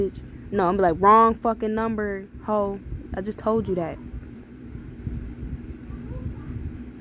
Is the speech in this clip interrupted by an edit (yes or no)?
no